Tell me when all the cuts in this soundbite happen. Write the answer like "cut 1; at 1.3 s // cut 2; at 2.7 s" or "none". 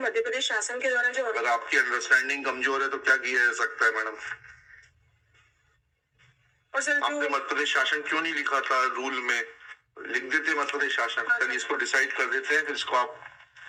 none